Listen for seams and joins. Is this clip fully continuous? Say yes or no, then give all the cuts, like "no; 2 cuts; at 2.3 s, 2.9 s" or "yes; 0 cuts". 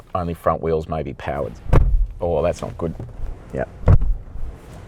no; 2 cuts; at 1.5 s, 3.1 s